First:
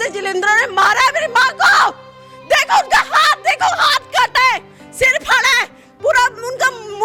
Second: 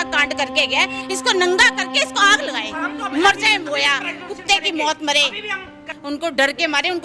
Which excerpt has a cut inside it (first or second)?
second